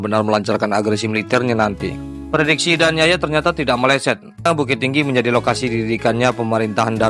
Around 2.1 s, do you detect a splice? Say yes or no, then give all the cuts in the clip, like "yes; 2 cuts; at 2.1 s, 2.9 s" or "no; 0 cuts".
yes; 2 cuts; at 2.1 s, 4.5 s